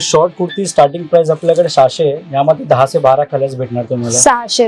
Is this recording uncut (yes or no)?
yes